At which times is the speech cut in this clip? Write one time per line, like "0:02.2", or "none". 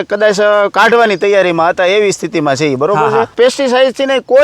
0:03.3